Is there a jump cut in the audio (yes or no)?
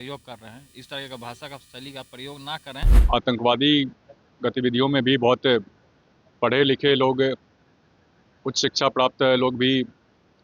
yes